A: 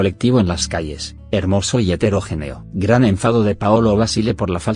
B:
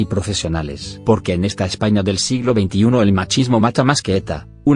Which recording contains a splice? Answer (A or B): B